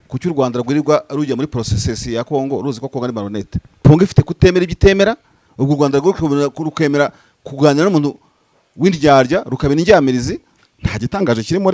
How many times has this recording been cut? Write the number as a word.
one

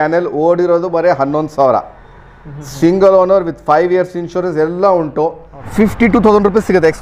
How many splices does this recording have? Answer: one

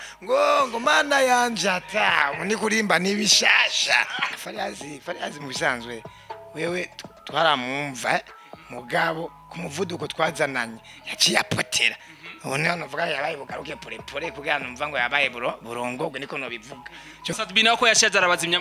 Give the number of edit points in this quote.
two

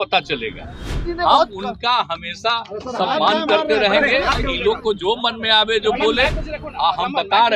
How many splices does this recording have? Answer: two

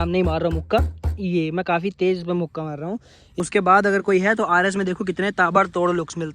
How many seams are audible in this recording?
one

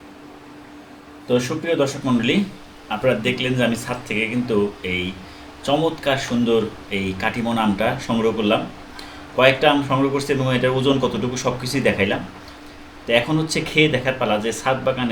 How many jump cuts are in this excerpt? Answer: zero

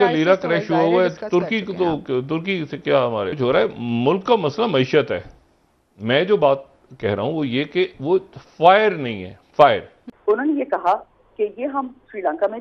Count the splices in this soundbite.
two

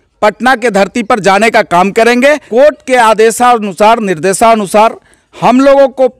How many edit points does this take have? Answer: one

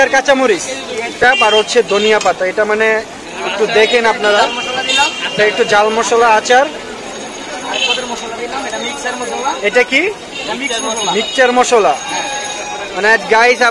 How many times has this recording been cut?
one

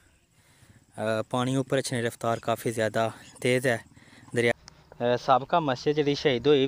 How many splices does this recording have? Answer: one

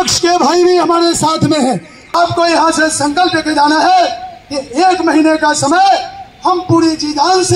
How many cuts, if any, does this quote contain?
one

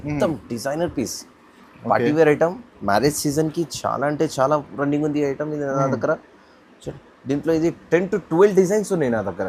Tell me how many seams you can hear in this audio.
zero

